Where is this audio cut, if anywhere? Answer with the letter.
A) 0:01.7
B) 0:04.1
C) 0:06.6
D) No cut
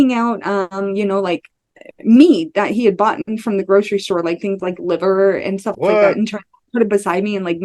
D